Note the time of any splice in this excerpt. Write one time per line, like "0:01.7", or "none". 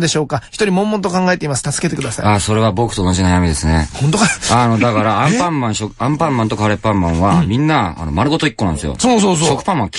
0:08.0